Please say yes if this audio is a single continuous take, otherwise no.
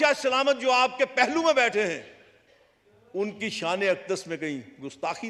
yes